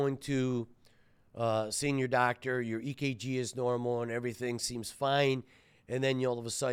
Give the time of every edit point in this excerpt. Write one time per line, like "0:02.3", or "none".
none